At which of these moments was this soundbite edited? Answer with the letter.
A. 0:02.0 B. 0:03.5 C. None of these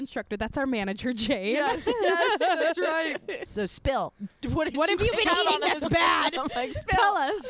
B